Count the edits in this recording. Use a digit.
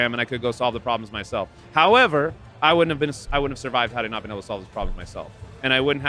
0